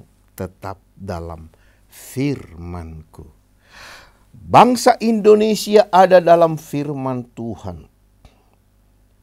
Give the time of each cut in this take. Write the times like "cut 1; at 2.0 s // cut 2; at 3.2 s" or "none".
none